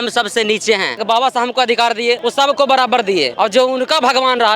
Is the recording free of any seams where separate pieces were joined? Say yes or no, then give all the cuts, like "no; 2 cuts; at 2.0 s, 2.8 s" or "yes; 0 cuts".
no; 3 cuts; at 1.0 s, 2.2 s, 3.3 s